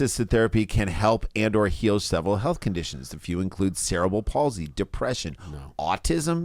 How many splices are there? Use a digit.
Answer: 0